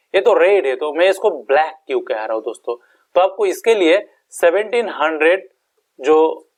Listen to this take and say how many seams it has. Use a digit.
0